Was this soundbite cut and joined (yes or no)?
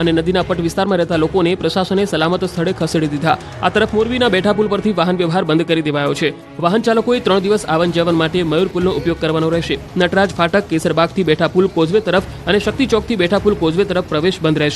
yes